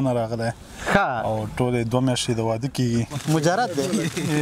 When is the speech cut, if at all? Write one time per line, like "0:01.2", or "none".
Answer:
0:03.1

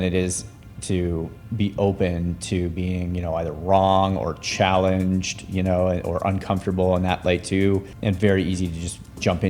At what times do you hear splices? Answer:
0:07.9

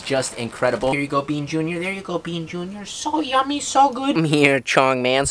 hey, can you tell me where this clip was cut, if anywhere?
0:00.9
0:04.1

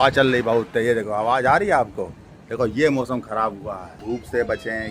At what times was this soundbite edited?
0:03.9

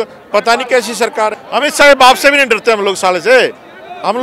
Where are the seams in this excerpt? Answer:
0:01.4

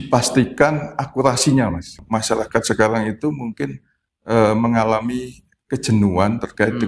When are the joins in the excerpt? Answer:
0:02.0

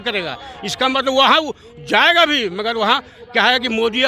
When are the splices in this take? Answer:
none

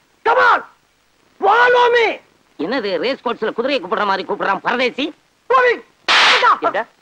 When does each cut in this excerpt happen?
0:05.5

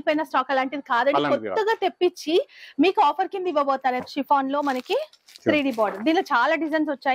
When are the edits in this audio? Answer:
0:04.0

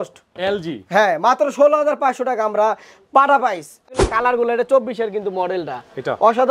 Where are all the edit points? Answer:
0:04.0

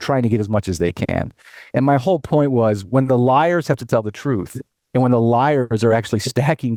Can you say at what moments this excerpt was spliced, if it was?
none

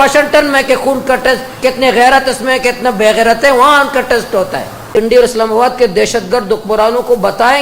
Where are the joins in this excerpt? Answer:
0:04.9

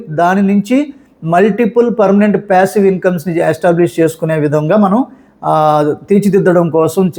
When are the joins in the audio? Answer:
none

